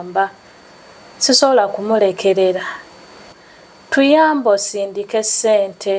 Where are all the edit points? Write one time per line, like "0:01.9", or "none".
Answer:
0:03.4